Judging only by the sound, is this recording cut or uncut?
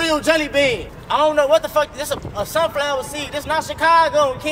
cut